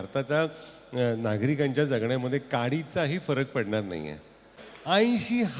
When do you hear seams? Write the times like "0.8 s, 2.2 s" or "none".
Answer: 4.6 s